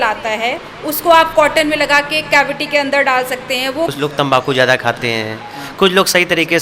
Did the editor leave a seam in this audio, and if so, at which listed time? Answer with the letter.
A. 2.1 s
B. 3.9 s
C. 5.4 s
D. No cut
B